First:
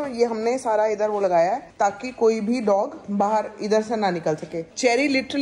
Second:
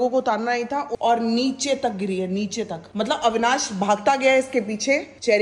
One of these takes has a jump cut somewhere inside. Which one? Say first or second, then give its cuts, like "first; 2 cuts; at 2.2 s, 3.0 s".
second; 1 cut; at 0.9 s